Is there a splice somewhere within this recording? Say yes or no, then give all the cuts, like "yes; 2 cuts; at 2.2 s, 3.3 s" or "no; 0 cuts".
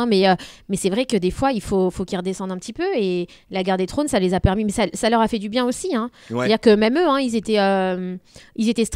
no; 0 cuts